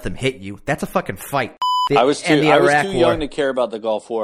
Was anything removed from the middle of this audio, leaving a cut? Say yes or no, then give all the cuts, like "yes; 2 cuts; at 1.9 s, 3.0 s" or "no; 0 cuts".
yes; 1 cut; at 1.7 s